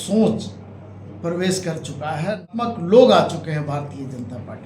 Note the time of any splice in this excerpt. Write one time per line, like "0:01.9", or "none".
0:02.5